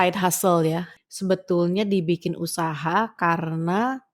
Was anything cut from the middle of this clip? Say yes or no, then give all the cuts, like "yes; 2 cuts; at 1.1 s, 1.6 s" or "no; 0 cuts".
yes; 1 cut; at 0.9 s